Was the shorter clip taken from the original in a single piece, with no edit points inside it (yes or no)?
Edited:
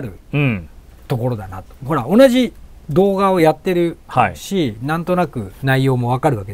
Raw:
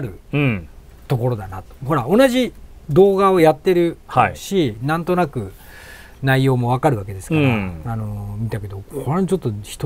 no